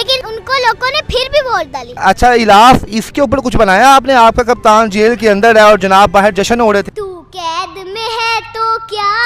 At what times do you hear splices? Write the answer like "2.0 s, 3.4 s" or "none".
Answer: 1.9 s, 6.9 s